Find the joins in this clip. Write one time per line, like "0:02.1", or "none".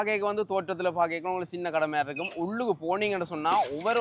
none